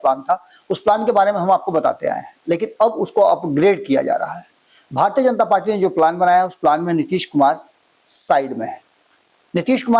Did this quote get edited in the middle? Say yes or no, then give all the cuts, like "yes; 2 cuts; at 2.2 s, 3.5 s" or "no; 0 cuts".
no; 0 cuts